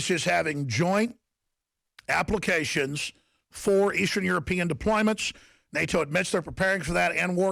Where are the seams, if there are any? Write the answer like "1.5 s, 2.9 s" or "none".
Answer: none